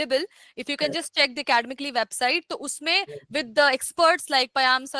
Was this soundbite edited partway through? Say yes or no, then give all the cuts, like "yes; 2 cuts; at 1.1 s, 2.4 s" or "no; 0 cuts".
no; 0 cuts